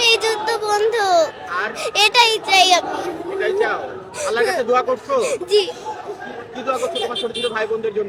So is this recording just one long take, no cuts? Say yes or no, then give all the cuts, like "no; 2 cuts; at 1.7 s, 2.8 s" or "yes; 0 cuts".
yes; 0 cuts